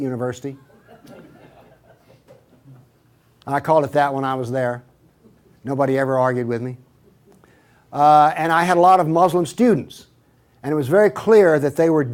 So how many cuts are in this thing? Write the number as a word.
one